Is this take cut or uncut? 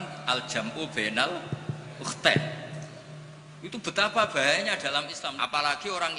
cut